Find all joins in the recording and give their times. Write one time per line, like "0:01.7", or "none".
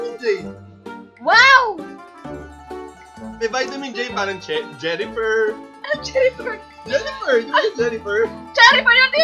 none